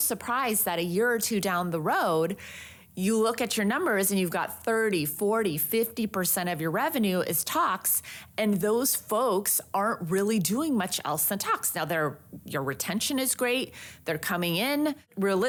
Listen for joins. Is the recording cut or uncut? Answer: uncut